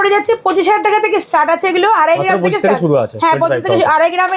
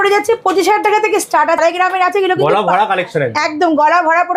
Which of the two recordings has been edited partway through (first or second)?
second